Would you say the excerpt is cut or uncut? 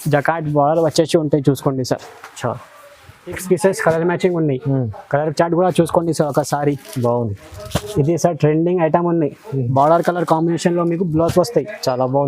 cut